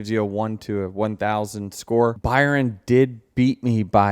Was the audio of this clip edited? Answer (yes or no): yes